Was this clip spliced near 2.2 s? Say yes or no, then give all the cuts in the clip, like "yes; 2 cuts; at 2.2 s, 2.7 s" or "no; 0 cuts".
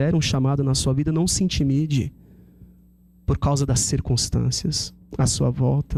no; 0 cuts